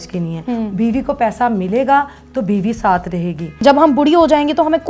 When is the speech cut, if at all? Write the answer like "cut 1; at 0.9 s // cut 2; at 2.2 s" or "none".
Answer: cut 1; at 3.6 s